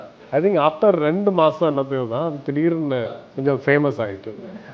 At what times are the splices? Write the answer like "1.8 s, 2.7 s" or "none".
3.2 s